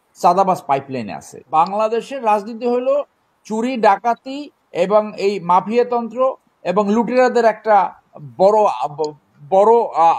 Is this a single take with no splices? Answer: no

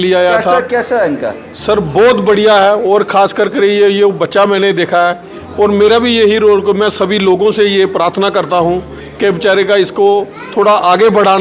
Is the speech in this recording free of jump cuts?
yes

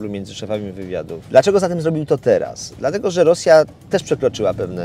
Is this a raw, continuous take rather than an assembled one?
no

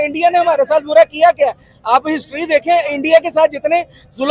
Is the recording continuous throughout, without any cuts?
yes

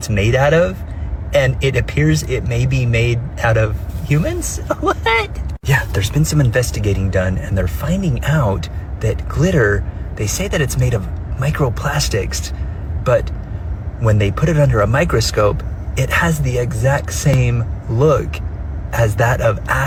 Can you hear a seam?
no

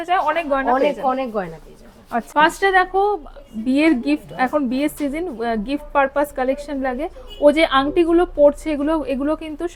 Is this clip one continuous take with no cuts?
yes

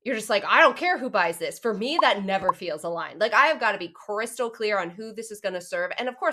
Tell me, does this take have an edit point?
no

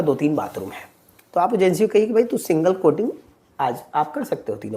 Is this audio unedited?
yes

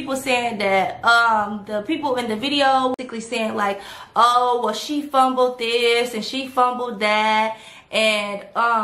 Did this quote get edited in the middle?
yes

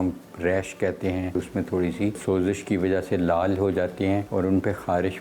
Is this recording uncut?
no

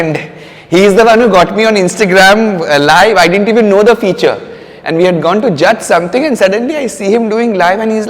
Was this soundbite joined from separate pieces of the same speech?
no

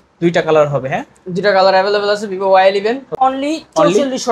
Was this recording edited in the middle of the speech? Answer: yes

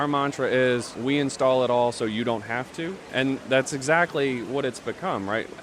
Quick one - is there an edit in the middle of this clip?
yes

